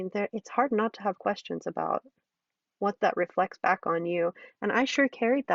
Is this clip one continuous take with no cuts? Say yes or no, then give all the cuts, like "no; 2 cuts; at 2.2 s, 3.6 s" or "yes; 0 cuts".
yes; 0 cuts